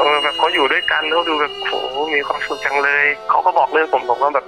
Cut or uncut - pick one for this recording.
cut